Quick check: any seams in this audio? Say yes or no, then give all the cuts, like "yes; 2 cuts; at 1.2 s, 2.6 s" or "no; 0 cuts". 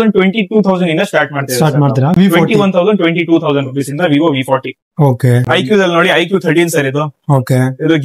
no; 0 cuts